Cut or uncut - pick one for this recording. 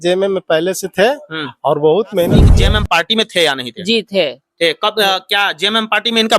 cut